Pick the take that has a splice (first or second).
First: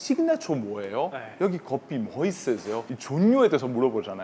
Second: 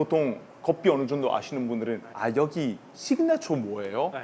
first